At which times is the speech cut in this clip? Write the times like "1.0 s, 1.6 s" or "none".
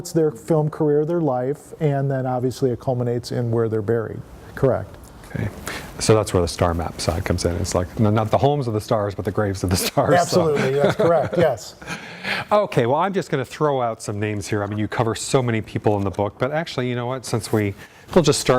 none